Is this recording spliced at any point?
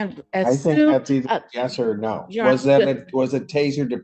no; 0 cuts

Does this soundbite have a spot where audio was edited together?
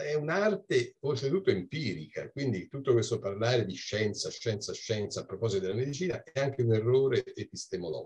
no; 0 cuts

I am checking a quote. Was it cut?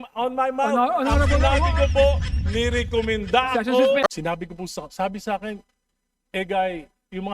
yes; 1 cut; at 4.0 s

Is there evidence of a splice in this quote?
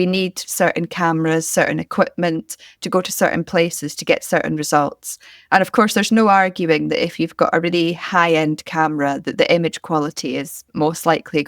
no; 0 cuts

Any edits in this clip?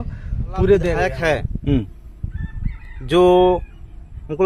yes; 1 cut; at 1.1 s

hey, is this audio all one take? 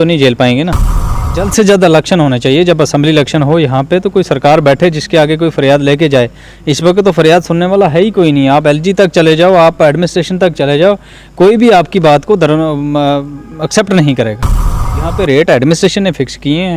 no; 2 cuts; at 1.1 s, 14.8 s

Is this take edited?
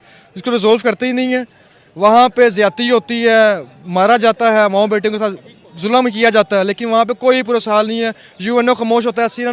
no; 0 cuts

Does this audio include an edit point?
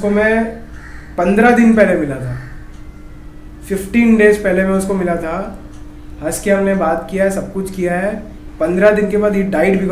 no; 0 cuts

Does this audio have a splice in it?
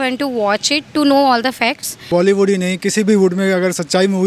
yes; 1 cut; at 2.1 s

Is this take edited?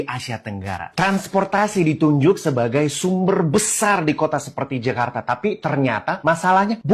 no; 0 cuts

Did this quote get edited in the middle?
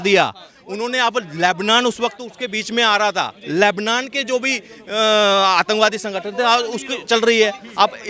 no; 0 cuts

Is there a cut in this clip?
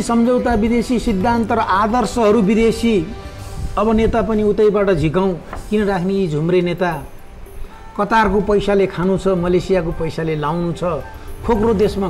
no; 0 cuts

